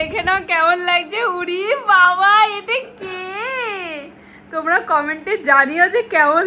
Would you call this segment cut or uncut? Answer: uncut